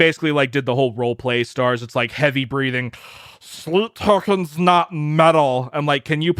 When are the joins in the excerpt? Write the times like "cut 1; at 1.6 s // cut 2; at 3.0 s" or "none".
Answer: none